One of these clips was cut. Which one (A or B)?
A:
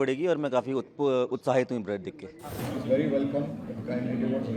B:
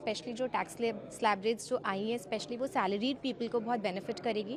A